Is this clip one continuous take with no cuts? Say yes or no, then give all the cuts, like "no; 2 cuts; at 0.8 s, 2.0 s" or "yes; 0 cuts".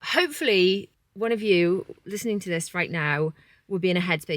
yes; 0 cuts